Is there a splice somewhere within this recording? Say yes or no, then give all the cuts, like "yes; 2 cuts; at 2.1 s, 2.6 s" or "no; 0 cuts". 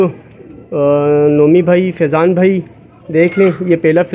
no; 0 cuts